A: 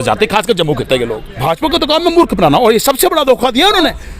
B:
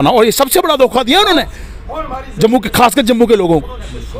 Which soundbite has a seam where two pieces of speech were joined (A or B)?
A